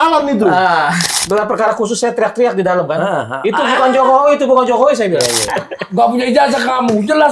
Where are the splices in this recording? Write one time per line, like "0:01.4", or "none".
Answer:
0:01.1
0:05.4